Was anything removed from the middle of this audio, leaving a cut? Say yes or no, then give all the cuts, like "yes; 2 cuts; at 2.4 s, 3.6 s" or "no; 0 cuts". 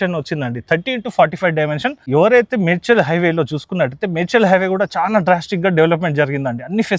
yes; 1 cut; at 2.0 s